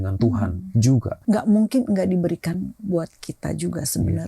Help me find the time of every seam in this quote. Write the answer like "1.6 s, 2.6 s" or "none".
1.1 s